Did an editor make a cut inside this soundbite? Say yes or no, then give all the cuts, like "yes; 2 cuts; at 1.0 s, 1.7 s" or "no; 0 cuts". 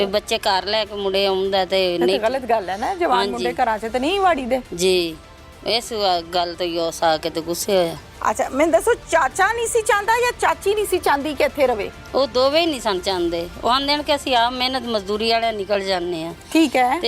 no; 0 cuts